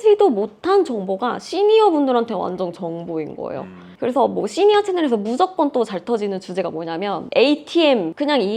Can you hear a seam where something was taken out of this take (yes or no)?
no